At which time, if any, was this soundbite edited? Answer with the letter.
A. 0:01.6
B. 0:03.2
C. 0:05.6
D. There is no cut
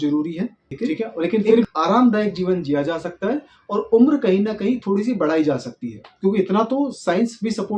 A